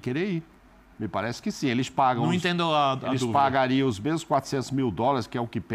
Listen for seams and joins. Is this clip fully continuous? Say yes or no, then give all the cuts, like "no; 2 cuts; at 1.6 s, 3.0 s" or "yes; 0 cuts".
yes; 0 cuts